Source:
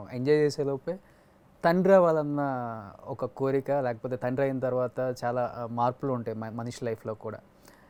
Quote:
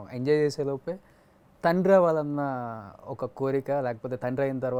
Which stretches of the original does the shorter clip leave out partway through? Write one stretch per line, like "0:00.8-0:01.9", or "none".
none